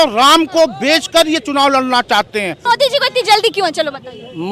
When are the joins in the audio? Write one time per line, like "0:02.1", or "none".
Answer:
0:02.6

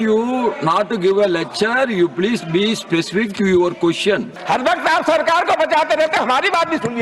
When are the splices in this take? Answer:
0:04.3

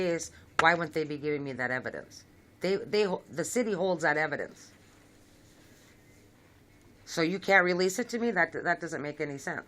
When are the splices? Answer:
0:06.4

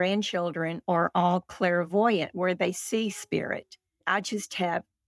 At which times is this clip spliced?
0:04.0

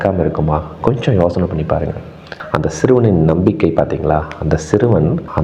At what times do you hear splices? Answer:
0:02.4

